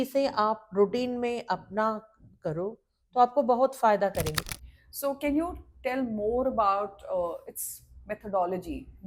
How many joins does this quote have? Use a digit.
1